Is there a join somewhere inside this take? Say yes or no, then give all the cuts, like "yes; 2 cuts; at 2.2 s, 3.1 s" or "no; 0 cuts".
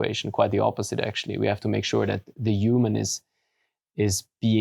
no; 0 cuts